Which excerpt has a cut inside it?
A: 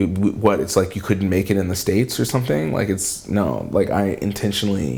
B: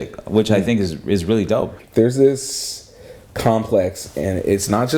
B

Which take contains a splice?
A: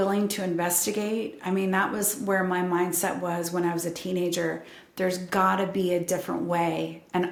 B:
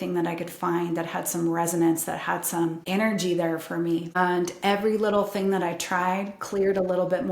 B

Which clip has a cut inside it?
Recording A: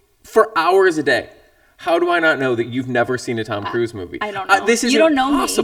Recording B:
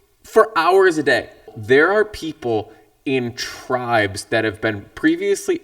B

